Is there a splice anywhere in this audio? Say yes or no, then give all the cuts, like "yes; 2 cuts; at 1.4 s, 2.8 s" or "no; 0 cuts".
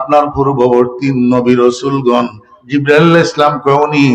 yes; 1 cut; at 2.6 s